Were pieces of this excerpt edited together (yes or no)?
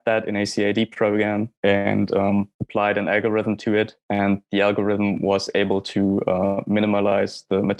no